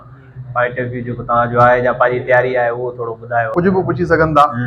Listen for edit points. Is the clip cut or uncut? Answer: cut